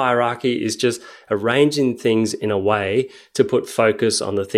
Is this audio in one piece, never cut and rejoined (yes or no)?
yes